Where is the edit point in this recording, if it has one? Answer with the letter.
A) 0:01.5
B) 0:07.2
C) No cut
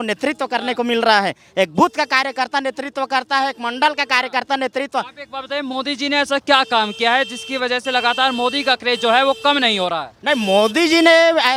C